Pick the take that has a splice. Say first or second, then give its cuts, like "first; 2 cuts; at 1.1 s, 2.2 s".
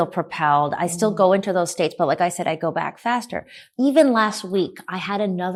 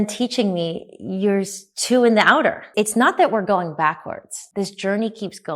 second; 2 cuts; at 2.6 s, 4.3 s